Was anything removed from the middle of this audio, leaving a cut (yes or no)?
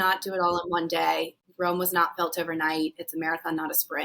yes